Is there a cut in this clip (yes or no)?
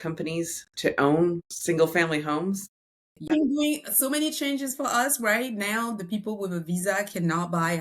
yes